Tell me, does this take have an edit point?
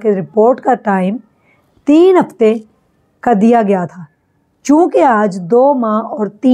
no; 0 cuts

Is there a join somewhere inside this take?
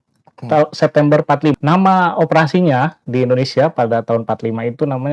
yes; 1 cut; at 1.6 s

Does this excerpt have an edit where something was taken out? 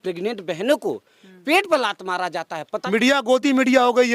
yes; 1 cut; at 2.8 s

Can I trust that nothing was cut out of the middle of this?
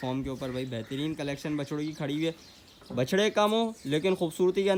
yes; 0 cuts

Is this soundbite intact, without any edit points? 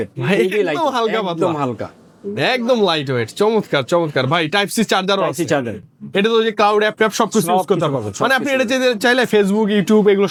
yes; 0 cuts

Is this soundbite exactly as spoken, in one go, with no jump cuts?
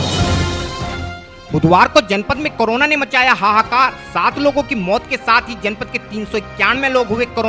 no; 1 cut; at 1.2 s

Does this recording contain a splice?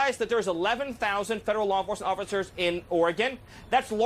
yes; 1 cut; at 0.9 s

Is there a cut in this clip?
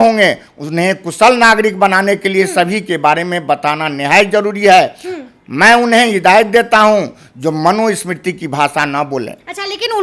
no; 0 cuts

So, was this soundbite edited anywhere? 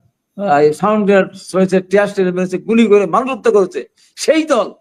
no; 0 cuts

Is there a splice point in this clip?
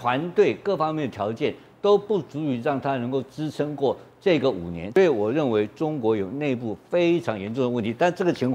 yes; 1 cut; at 4.7 s

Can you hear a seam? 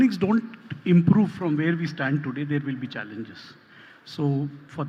no; 0 cuts

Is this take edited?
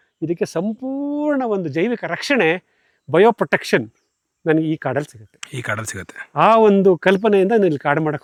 no; 0 cuts

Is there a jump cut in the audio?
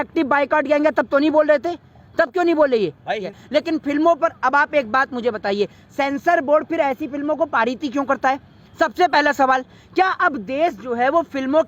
yes; 1 cut; at 3.3 s

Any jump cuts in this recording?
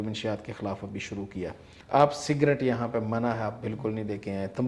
yes; 1 cut; at 1.7 s

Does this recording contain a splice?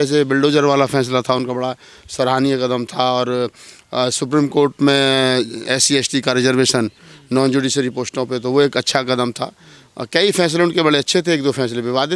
no; 0 cuts

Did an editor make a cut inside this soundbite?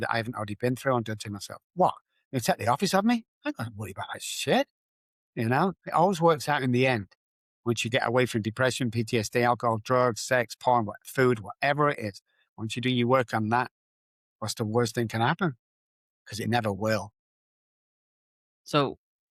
no; 0 cuts

